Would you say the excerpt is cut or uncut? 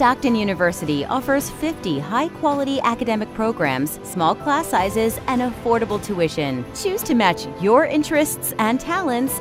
uncut